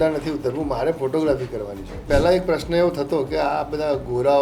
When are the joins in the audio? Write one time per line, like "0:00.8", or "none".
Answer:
0:02.0